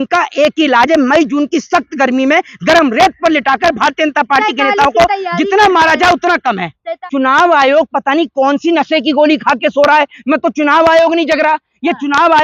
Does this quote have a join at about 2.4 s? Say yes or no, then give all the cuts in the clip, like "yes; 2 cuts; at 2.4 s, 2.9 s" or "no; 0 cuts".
no; 1 cut; at 7.0 s